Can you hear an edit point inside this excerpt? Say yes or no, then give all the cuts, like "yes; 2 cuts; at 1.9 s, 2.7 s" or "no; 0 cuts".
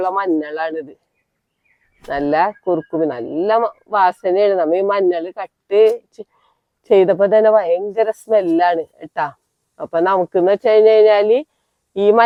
no; 0 cuts